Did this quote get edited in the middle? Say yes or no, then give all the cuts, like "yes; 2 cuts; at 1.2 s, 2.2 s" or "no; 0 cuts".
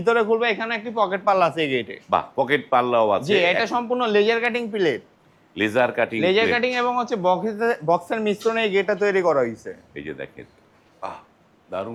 no; 0 cuts